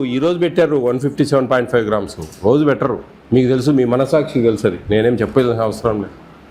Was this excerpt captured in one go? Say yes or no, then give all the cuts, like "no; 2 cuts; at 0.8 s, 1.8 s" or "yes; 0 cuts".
no; 1 cut; at 3.1 s